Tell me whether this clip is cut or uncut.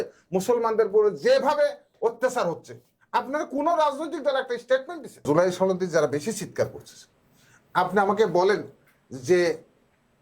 cut